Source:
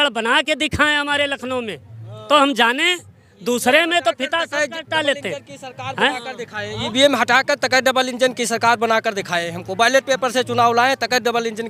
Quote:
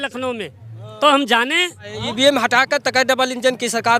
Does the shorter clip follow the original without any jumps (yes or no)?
no